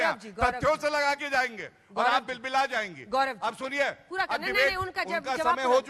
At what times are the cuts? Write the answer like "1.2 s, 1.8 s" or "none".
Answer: none